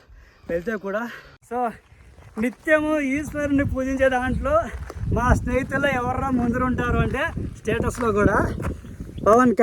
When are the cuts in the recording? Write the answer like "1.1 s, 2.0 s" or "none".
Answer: 1.3 s